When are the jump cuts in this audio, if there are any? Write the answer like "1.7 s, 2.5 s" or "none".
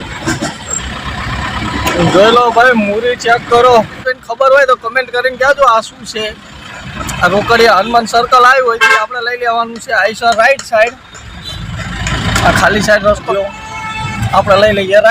4.0 s, 13.3 s